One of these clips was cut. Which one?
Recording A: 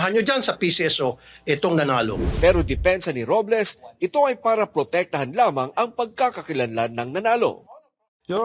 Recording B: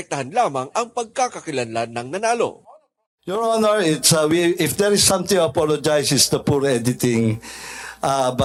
A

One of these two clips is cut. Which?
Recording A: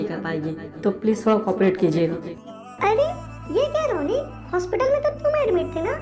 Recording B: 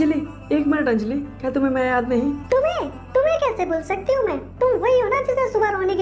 A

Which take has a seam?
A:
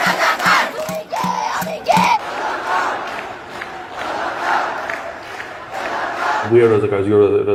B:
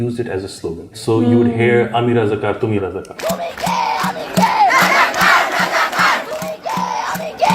B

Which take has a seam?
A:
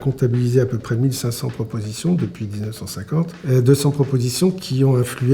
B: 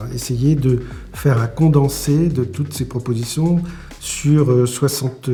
A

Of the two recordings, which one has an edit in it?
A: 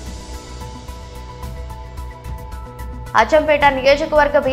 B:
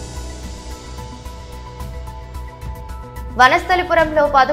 B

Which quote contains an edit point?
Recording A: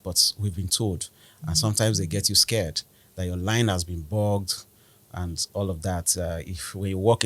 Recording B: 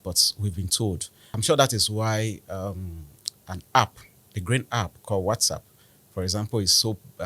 B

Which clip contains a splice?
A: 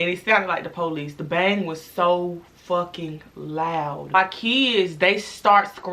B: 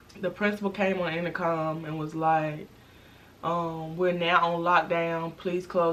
A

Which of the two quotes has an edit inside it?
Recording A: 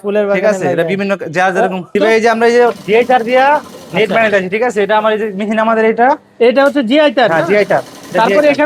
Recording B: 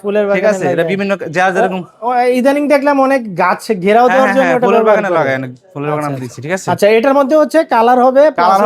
A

